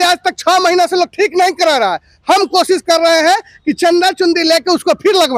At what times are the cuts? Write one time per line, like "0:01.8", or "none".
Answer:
none